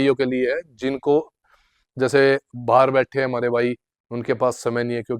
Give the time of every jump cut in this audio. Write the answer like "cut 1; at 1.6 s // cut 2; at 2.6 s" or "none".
none